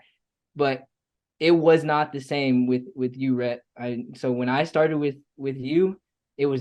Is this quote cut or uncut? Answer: uncut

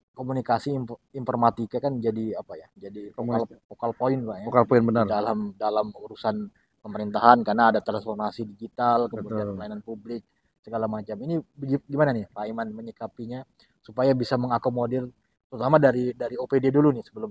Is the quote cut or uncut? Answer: uncut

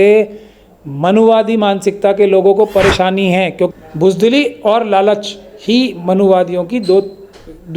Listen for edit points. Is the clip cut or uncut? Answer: cut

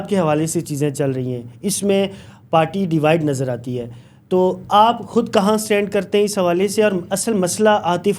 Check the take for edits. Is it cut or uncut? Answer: uncut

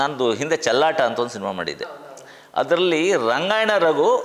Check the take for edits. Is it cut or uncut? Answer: uncut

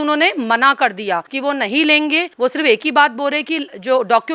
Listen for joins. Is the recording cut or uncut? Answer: cut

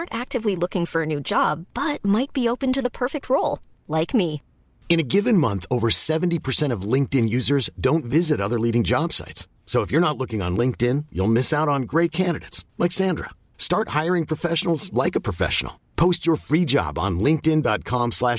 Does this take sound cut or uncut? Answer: uncut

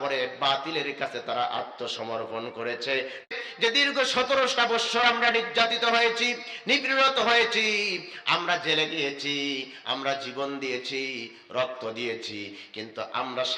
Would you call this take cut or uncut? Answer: cut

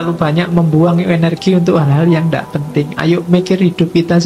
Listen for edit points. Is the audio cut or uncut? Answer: uncut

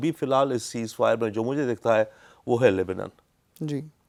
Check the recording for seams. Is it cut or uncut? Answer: uncut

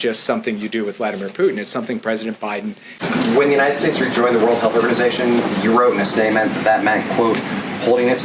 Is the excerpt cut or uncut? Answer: cut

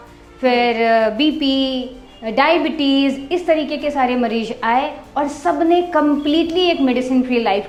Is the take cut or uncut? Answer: uncut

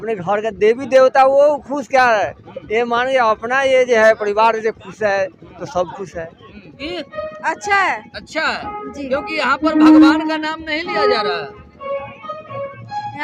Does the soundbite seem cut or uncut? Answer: cut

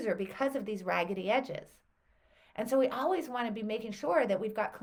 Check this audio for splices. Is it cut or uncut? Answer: uncut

